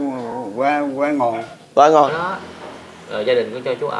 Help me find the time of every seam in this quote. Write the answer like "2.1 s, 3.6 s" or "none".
2.1 s